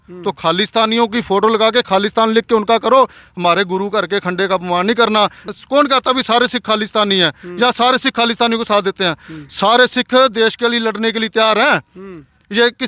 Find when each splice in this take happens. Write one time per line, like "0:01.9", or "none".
0:05.4